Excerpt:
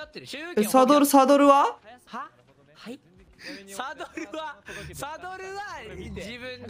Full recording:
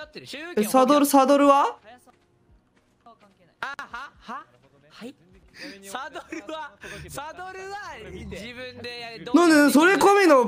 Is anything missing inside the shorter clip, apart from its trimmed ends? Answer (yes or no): yes